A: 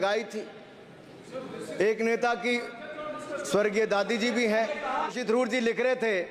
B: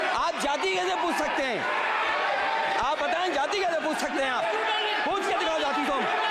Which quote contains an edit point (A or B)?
A